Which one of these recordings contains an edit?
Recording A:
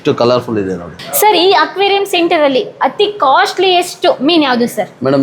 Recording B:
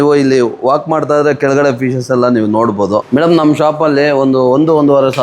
B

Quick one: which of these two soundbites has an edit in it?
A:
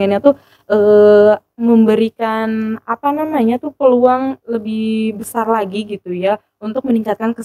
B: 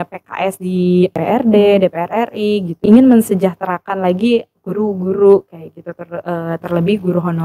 B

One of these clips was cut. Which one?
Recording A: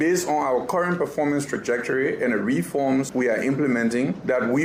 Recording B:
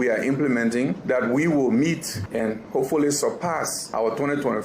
B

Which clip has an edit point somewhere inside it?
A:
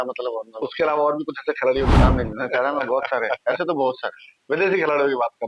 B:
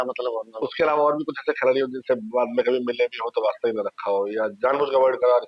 A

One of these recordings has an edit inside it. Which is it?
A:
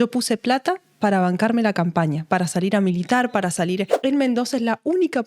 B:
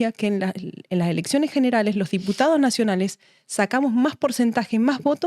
A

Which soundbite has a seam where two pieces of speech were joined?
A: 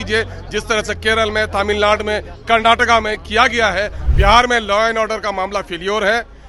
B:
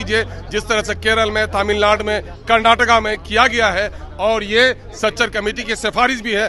A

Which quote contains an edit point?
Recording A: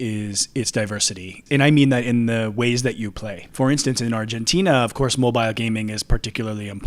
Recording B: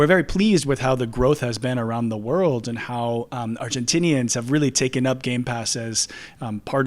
A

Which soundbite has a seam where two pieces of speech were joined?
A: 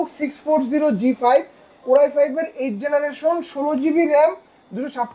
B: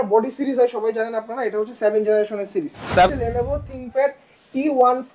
B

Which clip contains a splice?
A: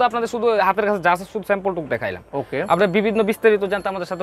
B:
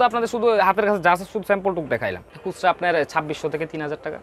B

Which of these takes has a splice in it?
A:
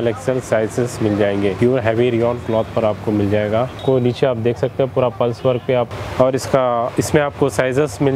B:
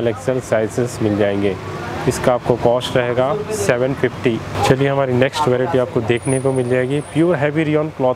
A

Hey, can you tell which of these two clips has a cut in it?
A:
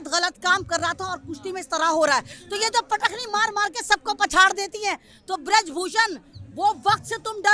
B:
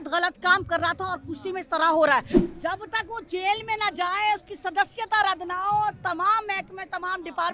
B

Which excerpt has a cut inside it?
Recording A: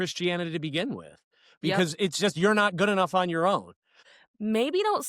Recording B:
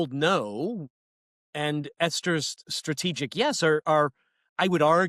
A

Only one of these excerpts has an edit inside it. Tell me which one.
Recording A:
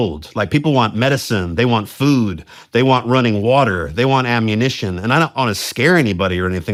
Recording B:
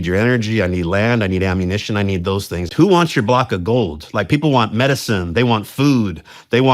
B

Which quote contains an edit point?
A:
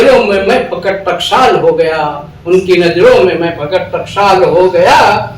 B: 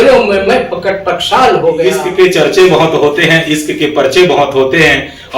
B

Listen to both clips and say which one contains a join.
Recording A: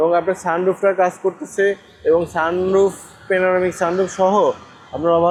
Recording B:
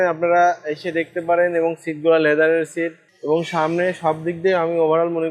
B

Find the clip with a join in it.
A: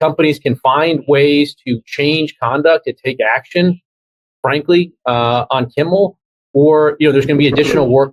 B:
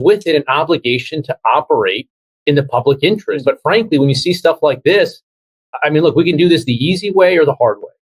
B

